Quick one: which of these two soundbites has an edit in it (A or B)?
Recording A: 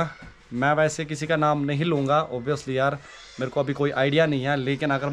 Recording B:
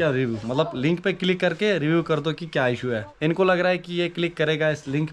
B